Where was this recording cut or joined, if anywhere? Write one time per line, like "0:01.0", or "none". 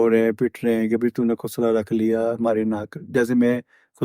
none

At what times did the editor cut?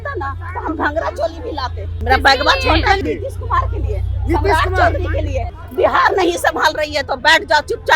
0:02.0
0:03.0
0:05.5

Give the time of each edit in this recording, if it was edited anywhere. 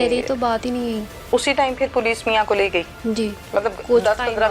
0:01.1
0:02.9

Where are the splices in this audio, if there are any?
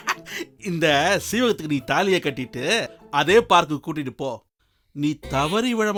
none

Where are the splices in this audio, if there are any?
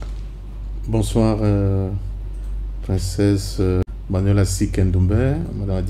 0:03.9

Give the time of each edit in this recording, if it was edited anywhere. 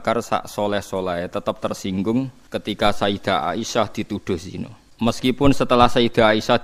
0:02.4
0:04.8

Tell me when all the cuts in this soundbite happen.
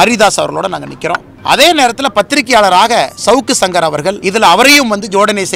0:01.3
0:04.2

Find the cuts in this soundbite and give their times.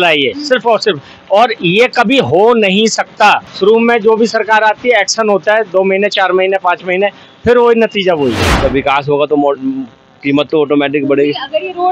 0:03.5
0:08.5

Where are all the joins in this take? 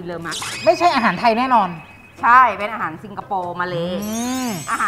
none

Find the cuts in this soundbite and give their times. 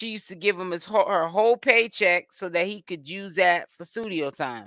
none

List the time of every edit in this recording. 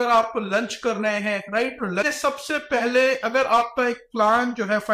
0:02.1

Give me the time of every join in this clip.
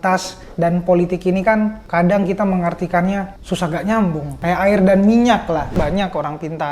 0:01.8
0:03.4
0:04.4
0:05.8

